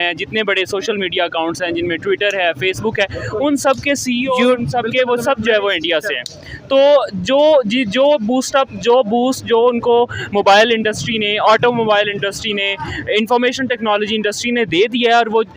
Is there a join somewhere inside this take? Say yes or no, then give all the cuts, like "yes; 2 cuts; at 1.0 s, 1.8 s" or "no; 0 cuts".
no; 0 cuts